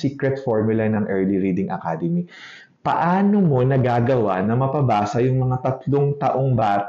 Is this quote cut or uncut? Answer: uncut